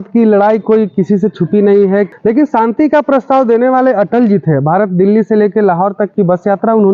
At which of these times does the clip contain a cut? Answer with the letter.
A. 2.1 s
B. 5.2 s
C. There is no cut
A